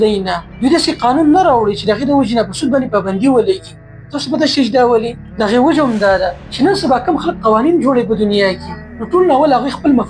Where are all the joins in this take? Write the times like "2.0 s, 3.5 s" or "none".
none